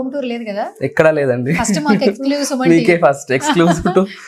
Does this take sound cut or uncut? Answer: uncut